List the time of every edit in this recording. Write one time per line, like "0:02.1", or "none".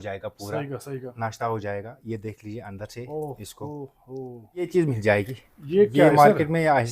0:04.7